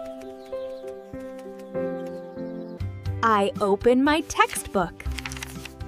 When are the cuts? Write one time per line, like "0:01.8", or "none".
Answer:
0:02.7